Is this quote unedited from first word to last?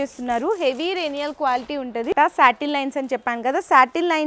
no; 1 cut; at 2.1 s

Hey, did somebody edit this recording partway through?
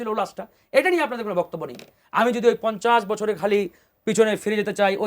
yes; 1 cut; at 2.0 s

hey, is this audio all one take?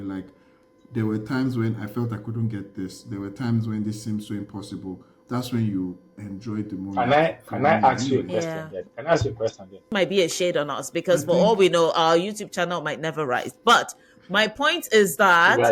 no; 1 cut; at 9.9 s

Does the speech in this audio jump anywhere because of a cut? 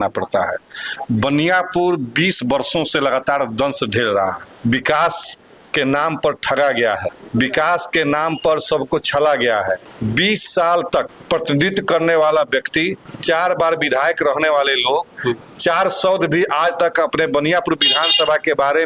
yes; 5 cuts; at 4.5 s, 7.2 s, 9.9 s, 11.2 s, 13.0 s

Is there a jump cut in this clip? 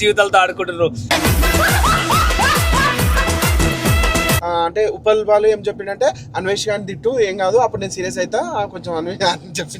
yes; 2 cuts; at 1.0 s, 4.4 s

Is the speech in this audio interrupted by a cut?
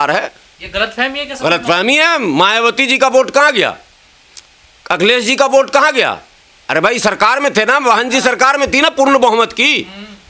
no; 0 cuts

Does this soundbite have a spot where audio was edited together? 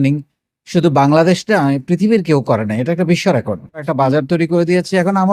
yes; 1 cut; at 3.9 s

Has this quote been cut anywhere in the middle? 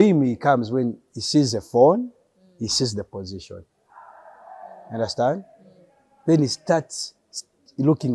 no; 0 cuts

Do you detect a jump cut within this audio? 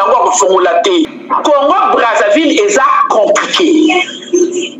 yes; 1 cut; at 1.1 s

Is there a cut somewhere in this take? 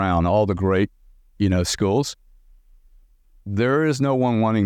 no; 0 cuts

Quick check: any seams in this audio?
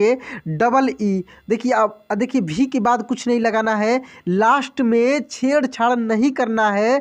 no; 0 cuts

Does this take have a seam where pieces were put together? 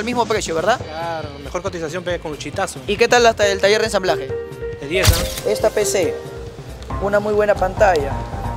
yes; 1 cut; at 5.3 s

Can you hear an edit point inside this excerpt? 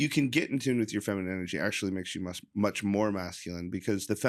no; 0 cuts

